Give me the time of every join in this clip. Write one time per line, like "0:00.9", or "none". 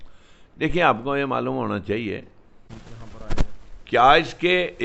0:02.7